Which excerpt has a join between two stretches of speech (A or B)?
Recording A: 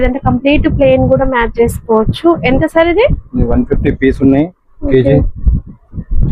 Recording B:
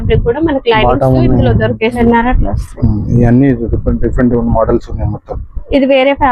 B